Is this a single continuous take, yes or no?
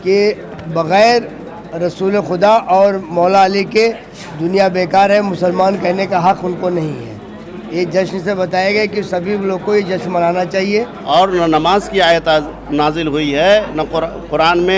no